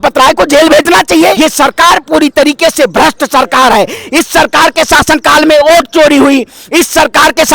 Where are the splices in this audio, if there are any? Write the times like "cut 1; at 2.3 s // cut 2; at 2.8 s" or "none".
cut 1; at 1.4 s